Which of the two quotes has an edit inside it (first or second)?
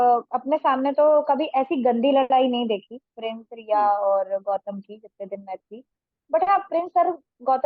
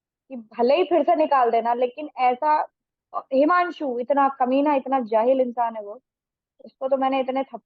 second